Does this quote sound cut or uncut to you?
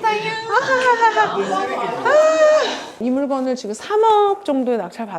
uncut